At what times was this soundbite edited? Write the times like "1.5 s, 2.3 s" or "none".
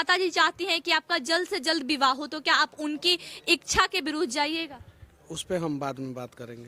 none